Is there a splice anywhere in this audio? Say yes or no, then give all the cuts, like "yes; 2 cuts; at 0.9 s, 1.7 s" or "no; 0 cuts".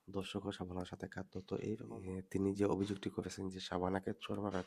yes; 1 cut; at 1.9 s